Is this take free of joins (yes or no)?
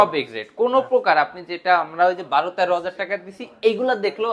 yes